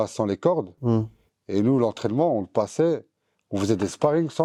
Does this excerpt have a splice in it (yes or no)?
no